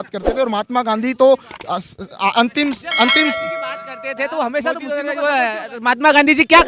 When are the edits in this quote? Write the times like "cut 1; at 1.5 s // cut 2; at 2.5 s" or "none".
cut 1; at 5.0 s